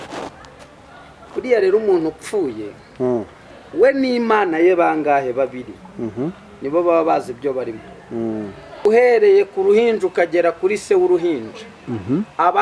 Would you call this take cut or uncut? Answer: cut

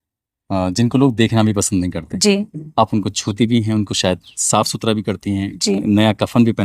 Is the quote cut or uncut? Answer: cut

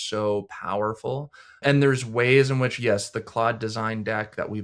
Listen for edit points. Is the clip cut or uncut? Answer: cut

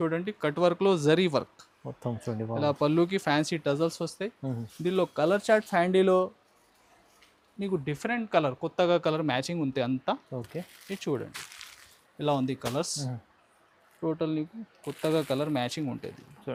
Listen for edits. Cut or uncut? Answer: uncut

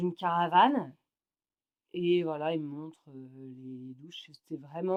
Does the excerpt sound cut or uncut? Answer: uncut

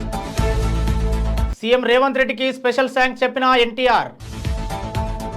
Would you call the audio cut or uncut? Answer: cut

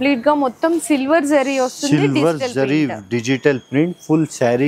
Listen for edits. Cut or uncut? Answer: uncut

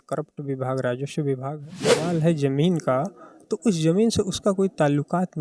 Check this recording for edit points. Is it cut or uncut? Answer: cut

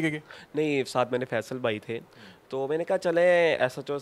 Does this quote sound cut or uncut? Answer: uncut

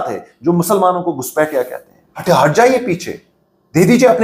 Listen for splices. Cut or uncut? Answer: cut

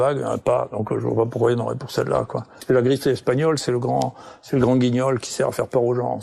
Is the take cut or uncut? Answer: cut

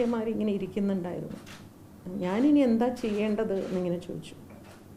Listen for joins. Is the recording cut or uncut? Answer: uncut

